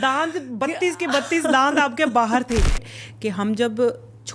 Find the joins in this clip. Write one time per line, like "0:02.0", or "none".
0:02.9